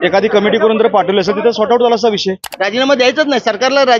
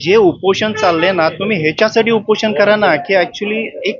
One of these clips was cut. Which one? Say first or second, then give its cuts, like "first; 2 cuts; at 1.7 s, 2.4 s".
first; 1 cut; at 2.4 s